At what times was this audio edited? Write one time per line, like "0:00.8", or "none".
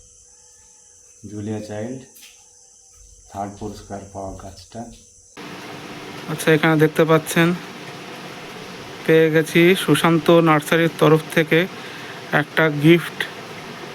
0:05.4